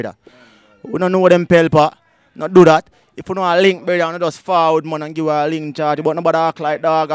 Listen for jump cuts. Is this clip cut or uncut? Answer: uncut